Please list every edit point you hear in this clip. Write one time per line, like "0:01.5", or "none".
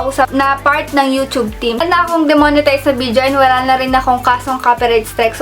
0:01.8